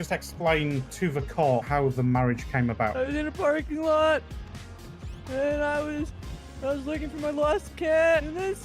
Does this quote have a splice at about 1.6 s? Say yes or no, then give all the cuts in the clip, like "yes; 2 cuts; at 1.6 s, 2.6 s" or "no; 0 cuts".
yes; 1 cut; at 1.6 s